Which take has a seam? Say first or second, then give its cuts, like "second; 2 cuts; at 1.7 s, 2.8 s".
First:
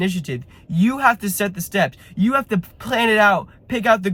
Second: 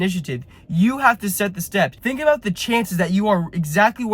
second; 1 cut; at 2.0 s